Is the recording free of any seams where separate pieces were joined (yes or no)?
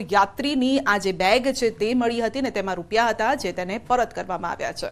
yes